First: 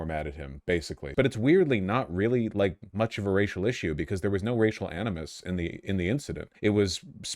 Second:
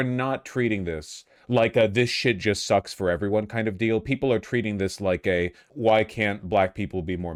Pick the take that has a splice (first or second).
first